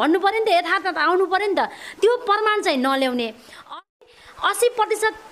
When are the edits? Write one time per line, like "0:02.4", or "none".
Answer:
0:04.0